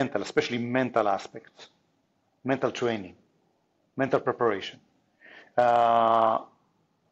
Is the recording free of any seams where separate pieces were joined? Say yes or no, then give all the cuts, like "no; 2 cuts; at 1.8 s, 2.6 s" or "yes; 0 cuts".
yes; 0 cuts